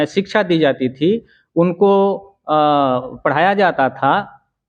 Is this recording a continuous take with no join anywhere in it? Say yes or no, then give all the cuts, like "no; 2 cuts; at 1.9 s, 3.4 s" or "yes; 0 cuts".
yes; 0 cuts